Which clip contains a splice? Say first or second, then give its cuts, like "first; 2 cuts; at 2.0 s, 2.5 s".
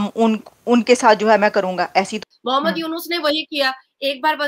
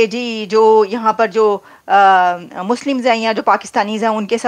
first; 1 cut; at 2.1 s